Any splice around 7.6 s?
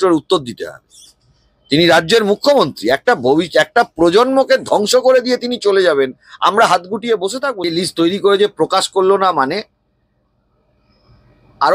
yes; 1 cut; at 7.6 s

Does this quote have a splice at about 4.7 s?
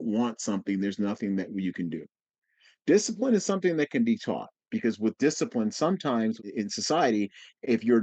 yes; 2 cuts; at 4.7 s, 6.5 s

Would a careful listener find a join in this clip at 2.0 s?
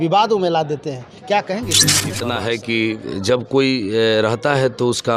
yes; 1 cut; at 2.0 s

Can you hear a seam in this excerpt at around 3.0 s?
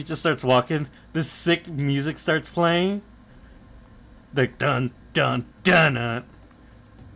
no; 0 cuts

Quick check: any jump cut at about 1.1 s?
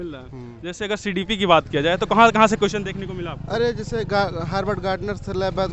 no; 0 cuts

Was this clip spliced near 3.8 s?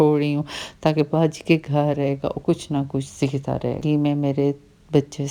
yes; 1 cut; at 3.8 s

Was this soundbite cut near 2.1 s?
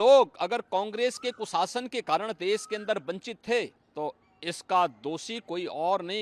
no; 1 cut; at 3.8 s

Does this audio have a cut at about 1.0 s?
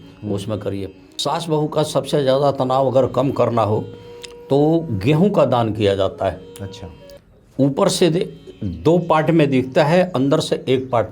yes; 1 cut; at 1.0 s

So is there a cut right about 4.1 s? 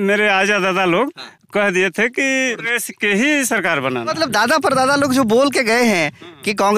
yes; 2 cuts; at 2.7 s, 4.1 s

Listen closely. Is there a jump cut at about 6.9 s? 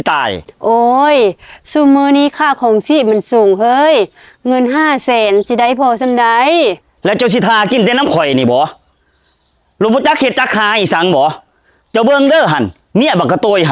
yes; 1 cut; at 6.9 s

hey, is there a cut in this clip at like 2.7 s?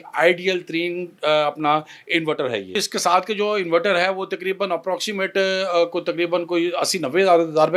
yes; 1 cut; at 2.7 s

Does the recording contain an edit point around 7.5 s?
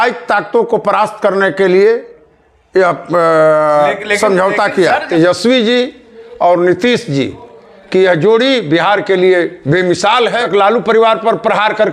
no; 2 cuts; at 5.0 s, 10.4 s

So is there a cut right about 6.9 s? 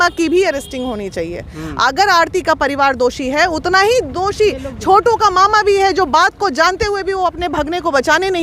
no; 0 cuts

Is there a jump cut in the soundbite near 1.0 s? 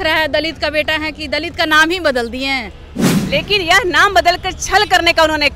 no; 1 cut; at 3.1 s

